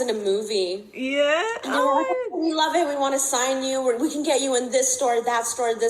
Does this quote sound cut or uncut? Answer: uncut